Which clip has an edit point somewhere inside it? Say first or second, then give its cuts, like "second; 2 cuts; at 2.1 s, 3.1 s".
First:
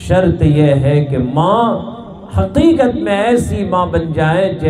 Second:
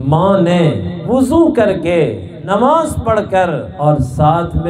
second; 3 cuts; at 0.9 s, 2.3 s, 3.7 s